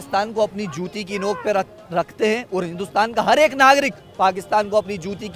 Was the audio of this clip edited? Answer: no; 0 cuts

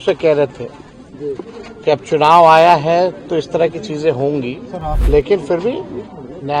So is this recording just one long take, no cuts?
no; 1 cut; at 4.9 s

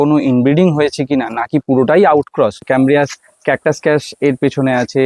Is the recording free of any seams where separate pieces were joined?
no; 1 cut; at 2.7 s

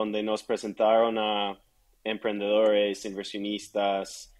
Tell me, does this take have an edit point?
no; 0 cuts

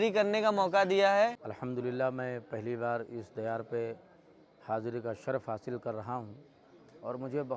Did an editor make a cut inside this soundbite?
yes; 1 cut; at 1.4 s

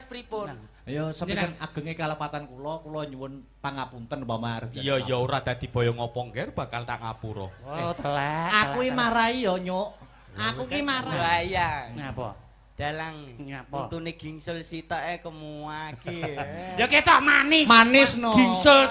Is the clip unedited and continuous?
no; 1 cut; at 11.0 s

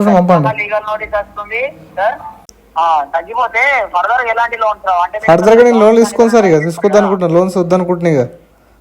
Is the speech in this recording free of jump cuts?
no; 1 cut; at 2.6 s

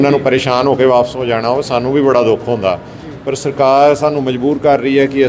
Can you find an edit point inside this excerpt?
no; 0 cuts

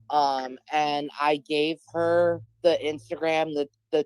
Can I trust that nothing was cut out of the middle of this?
no; 1 cut; at 2.5 s

